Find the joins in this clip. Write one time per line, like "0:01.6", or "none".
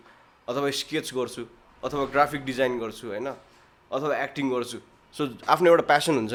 none